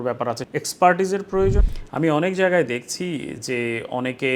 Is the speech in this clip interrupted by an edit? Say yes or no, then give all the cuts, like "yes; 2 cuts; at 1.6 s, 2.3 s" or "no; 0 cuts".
yes; 1 cut; at 1.7 s